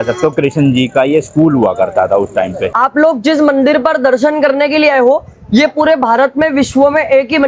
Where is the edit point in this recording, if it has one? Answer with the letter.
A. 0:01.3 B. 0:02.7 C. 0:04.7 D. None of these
B